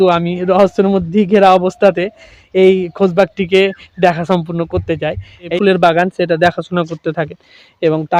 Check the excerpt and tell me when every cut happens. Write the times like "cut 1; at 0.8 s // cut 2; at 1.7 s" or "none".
cut 1; at 5.5 s